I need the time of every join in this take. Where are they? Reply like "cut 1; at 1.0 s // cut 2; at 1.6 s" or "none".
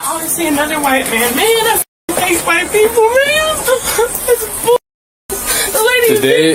cut 1; at 3.6 s